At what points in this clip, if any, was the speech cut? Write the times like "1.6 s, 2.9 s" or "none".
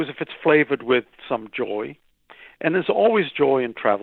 none